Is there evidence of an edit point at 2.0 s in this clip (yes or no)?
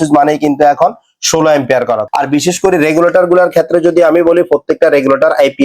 yes